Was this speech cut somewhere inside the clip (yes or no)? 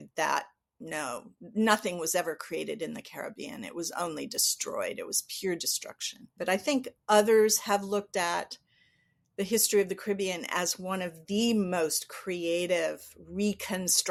no